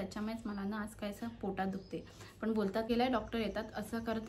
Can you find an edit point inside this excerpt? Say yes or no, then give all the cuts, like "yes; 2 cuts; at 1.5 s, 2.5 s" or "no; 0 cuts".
yes; 1 cut; at 2.8 s